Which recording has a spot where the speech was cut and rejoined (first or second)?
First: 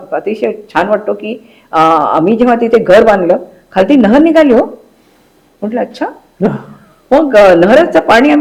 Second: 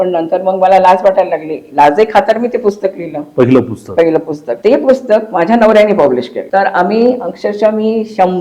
second